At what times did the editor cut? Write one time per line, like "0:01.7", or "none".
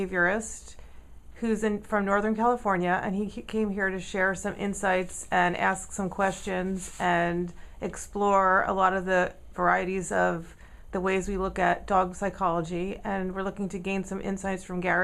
none

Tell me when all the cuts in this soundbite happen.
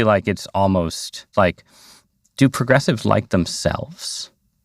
0:01.3

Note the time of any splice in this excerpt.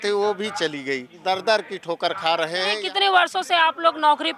0:01.1
0:02.8

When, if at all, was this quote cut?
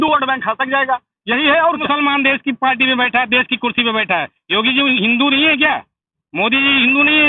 0:01.8

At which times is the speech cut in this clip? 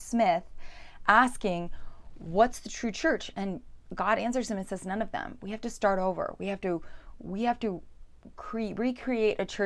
none

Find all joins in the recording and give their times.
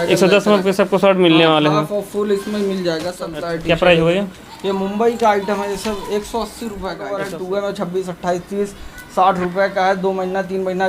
0:03.2
0:07.1

